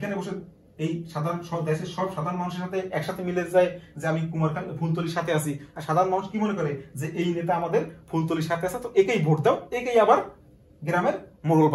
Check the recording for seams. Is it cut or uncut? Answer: uncut